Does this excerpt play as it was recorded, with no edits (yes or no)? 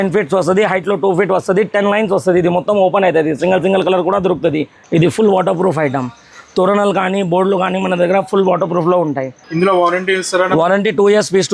no